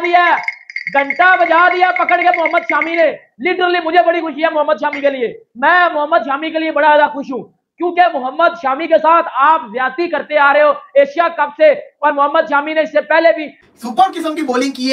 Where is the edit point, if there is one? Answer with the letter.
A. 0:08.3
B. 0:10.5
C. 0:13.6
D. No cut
C